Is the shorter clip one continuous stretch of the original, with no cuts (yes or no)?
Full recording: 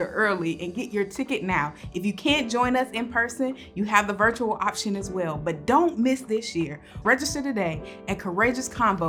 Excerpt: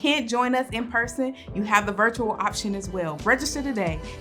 no